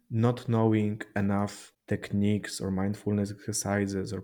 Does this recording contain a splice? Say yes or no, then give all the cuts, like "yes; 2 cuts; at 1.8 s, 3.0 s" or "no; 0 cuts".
yes; 1 cut; at 1.7 s